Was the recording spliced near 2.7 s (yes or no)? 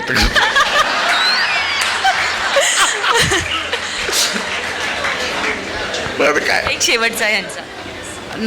no